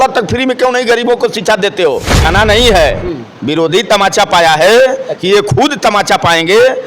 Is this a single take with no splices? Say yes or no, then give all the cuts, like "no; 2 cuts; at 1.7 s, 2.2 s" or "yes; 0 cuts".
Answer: no; 1 cut; at 2.3 s